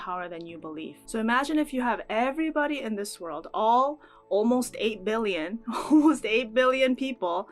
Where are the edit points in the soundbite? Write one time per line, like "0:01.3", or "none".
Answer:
0:00.9